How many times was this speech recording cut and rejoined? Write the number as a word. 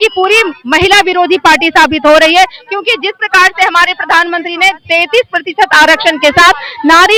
zero